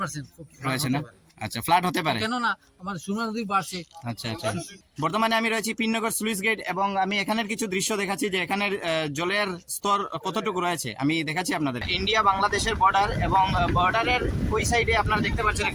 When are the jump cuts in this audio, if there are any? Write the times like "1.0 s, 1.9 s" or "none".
4.7 s, 11.8 s